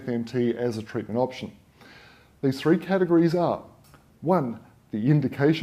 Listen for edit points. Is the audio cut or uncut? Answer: uncut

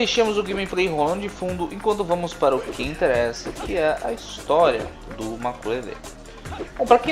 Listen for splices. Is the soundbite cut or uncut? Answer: cut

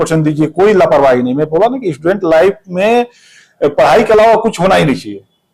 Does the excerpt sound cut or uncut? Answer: uncut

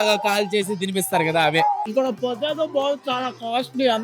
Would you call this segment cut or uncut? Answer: cut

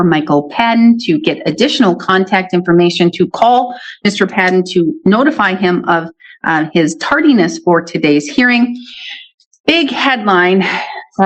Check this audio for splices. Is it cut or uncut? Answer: uncut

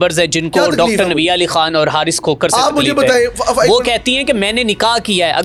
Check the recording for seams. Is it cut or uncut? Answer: uncut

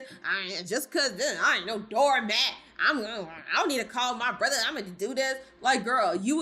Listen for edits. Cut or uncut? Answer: uncut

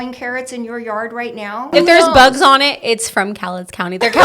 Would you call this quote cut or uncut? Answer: cut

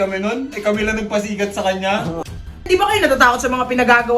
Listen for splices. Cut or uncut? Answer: cut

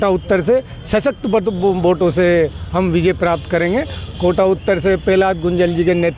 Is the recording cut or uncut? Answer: uncut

